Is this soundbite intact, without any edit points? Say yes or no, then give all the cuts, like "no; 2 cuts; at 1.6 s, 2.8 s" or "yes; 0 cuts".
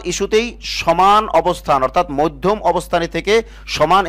yes; 0 cuts